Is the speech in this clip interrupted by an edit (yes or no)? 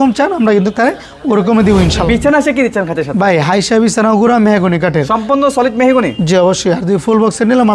yes